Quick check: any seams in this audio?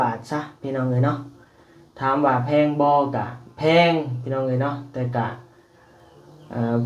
no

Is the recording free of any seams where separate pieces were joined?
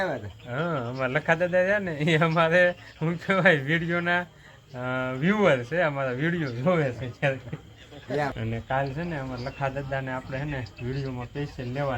no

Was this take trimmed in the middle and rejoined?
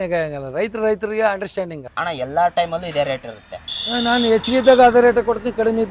yes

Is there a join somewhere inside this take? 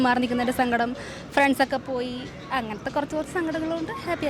no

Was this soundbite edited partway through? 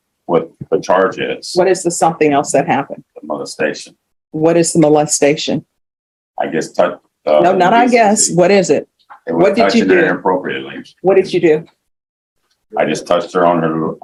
no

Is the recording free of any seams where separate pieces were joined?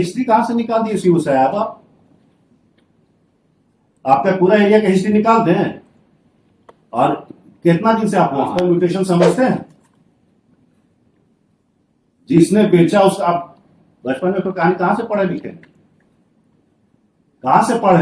no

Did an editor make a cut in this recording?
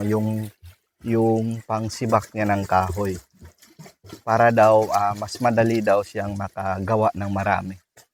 no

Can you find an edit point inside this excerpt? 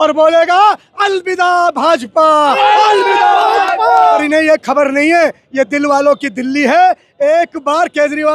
yes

